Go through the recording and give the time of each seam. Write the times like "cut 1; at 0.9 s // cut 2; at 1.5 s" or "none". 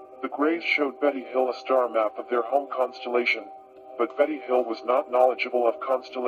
none